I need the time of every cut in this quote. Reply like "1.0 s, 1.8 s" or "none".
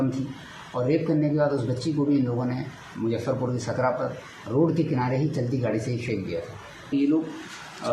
6.9 s